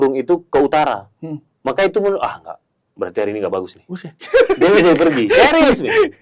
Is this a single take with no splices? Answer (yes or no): yes